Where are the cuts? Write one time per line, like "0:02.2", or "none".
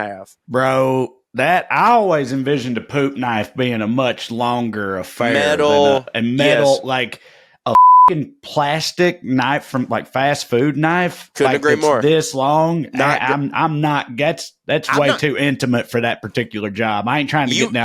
none